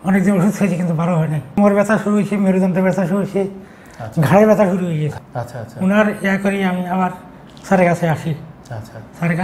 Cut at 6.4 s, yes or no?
no